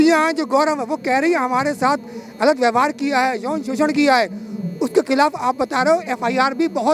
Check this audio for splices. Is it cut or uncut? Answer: uncut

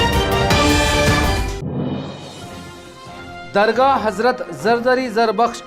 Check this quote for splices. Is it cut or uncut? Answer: cut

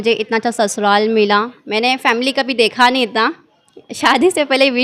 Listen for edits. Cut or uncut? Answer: uncut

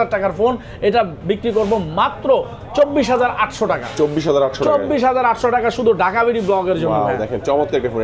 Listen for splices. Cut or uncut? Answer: uncut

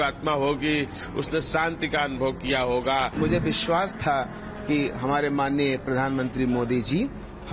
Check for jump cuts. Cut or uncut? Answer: cut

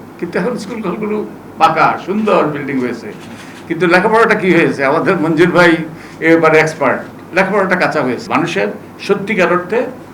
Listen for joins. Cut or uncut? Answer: cut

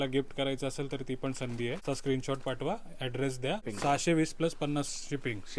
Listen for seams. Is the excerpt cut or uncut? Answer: cut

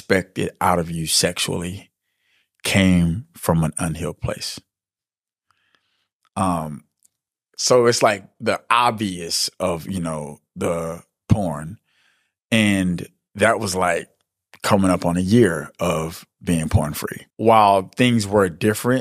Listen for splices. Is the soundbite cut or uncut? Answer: uncut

